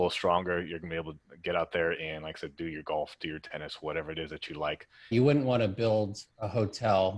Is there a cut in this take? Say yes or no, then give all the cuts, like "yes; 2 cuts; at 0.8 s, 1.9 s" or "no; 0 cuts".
yes; 1 cut; at 4.9 s